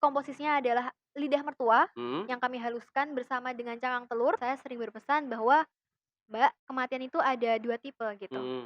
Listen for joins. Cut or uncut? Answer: cut